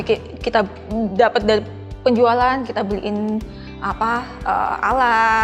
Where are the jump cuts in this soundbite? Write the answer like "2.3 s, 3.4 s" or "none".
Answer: none

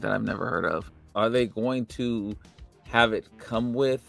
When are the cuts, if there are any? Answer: 1.0 s

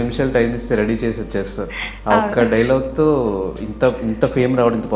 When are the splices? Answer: none

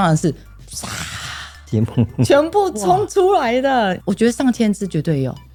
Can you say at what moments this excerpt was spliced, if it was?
none

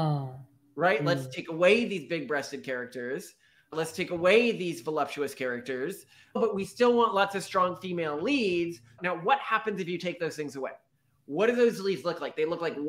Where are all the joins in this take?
6.4 s, 9.0 s

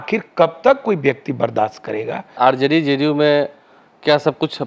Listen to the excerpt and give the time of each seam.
2.4 s

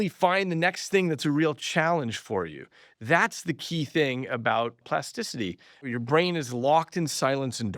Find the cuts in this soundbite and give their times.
5.9 s

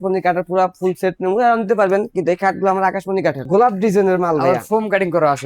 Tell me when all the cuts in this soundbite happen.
3.4 s

